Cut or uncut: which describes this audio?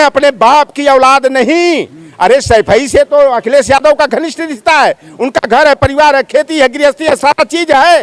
uncut